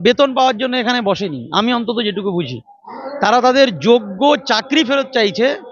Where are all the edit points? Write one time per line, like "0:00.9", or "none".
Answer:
none